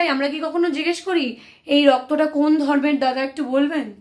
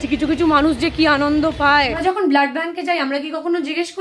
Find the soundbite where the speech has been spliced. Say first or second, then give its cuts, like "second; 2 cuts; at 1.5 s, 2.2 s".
second; 1 cut; at 2.0 s